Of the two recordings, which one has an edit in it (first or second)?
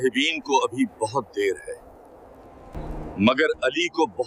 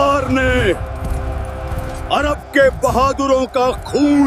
first